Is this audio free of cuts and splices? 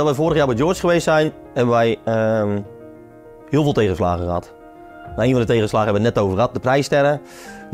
yes; 0 cuts

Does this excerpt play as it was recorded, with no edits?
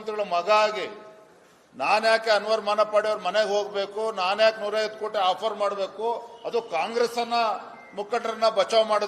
yes; 0 cuts

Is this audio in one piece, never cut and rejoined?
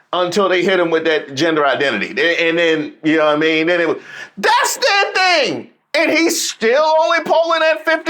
yes; 0 cuts

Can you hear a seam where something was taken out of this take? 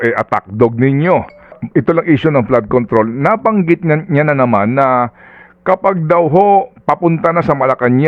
yes; 1 cut; at 1.6 s

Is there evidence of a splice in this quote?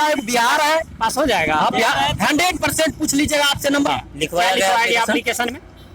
yes; 1 cut; at 3.9 s

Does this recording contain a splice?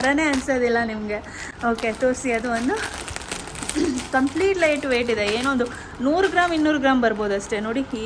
no; 0 cuts

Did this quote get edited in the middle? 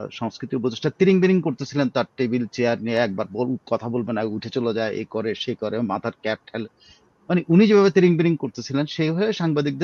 no; 0 cuts

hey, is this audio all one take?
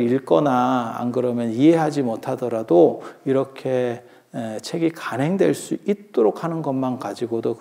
yes; 0 cuts

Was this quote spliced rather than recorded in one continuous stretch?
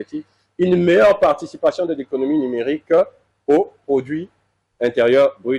no; 0 cuts

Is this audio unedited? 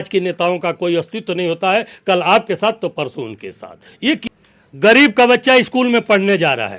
no; 1 cut; at 4.2 s

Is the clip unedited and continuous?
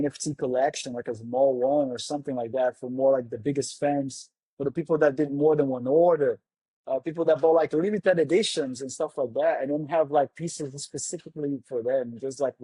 yes; 0 cuts

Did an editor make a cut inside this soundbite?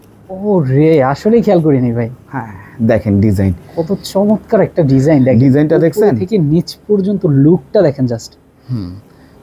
no; 0 cuts

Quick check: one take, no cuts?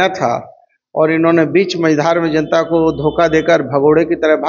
yes; 0 cuts

